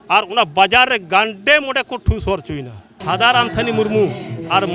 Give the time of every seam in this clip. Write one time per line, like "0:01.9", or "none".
0:03.0